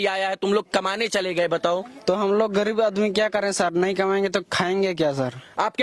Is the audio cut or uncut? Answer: uncut